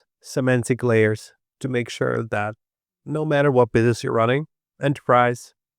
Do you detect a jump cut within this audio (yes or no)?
no